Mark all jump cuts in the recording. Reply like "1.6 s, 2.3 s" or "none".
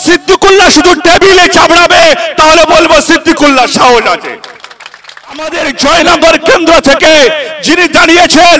5.5 s